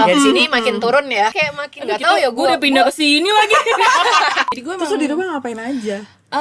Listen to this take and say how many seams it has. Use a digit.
2